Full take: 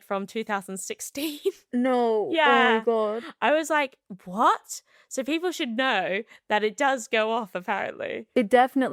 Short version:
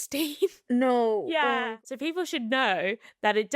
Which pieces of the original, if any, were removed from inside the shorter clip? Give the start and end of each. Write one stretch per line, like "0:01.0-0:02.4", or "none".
0:02.7-0:04.9